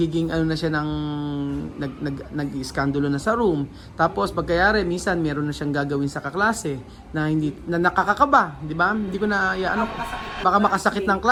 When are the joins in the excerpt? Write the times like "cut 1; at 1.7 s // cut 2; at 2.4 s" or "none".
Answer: none